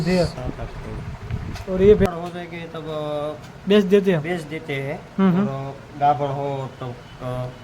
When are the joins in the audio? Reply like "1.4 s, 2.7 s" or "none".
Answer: 2.1 s